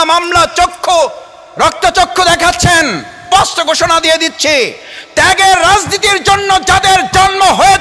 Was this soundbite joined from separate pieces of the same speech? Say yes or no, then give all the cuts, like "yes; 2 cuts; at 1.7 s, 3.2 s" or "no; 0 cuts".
yes; 1 cut; at 3.2 s